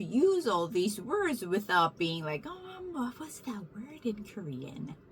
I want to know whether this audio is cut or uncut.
uncut